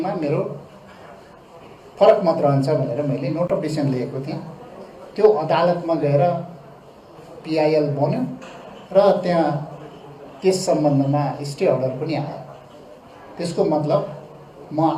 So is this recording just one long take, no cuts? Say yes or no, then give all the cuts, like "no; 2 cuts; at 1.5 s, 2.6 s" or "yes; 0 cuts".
yes; 0 cuts